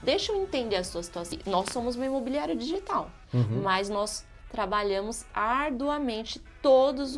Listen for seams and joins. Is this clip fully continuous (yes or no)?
no